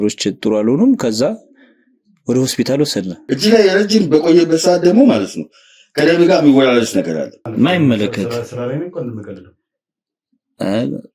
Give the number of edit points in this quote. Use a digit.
2